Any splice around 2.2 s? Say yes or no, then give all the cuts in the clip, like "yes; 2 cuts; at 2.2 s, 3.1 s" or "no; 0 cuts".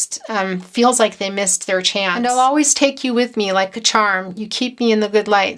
yes; 1 cut; at 2.2 s